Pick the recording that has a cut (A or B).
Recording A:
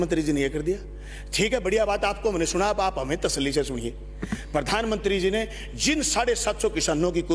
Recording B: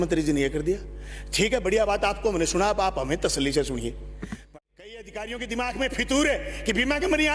B